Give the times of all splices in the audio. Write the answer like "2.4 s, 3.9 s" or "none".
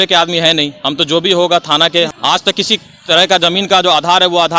2.1 s